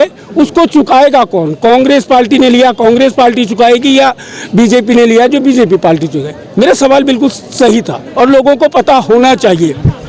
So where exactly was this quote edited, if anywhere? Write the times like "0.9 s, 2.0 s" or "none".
none